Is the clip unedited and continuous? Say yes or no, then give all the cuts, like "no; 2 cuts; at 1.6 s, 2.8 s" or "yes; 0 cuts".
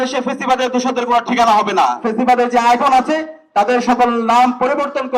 no; 1 cut; at 2.0 s